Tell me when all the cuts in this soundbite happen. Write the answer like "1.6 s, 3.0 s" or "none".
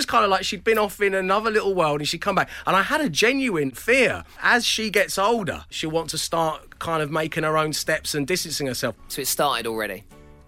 4.0 s, 5.7 s, 9.1 s